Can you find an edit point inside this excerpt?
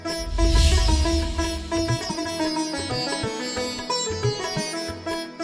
yes; 1 cut; at 2.2 s

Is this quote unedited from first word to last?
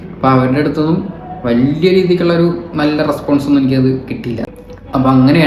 no; 1 cut; at 4.5 s

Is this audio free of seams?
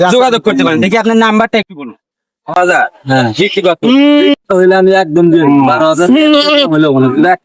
no; 1 cut; at 2.6 s

